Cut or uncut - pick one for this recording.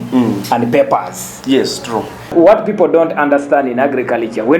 cut